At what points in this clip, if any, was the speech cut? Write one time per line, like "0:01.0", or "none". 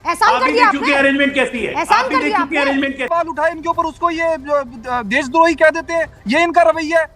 0:03.1